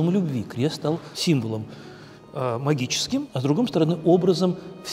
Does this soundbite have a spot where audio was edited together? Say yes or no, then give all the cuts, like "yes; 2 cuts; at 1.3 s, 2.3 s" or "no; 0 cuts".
yes; 2 cuts; at 1.1 s, 3.3 s